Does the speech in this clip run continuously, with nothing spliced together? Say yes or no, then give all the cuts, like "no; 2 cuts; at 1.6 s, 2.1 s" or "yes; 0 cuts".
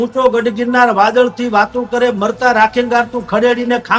yes; 0 cuts